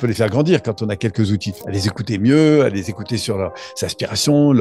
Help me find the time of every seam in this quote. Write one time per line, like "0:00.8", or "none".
0:01.6